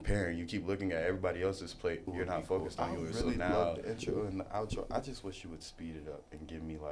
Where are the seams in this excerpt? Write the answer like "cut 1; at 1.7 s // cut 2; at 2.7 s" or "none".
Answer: cut 1; at 3.8 s